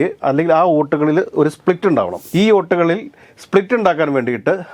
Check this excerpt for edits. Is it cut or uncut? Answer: cut